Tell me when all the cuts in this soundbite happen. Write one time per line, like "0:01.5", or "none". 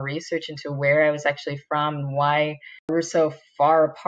0:02.9